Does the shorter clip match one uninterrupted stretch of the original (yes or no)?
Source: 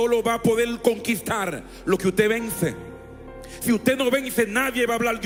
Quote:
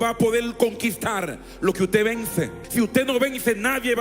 no